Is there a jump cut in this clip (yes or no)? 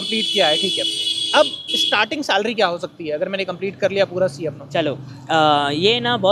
no